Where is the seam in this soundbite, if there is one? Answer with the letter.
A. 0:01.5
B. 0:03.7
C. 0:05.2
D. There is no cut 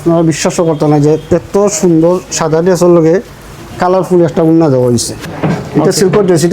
C